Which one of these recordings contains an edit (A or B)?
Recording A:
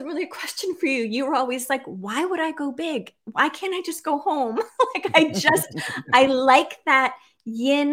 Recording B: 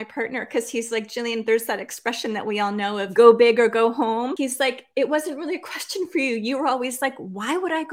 B